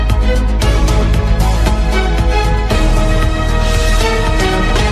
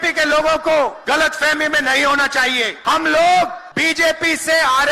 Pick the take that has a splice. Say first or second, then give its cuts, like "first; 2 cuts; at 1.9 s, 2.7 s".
second; 3 cuts; at 1.0 s, 2.8 s, 3.6 s